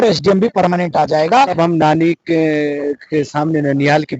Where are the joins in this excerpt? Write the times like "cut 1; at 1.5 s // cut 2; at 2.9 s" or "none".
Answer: cut 1; at 1.5 s